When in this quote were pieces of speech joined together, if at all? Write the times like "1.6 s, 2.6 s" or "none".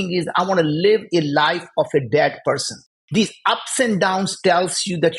2.9 s